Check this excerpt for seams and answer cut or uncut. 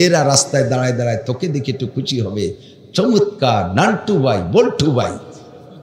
uncut